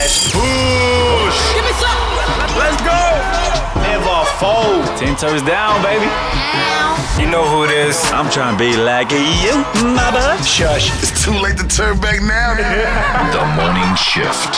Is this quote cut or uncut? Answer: uncut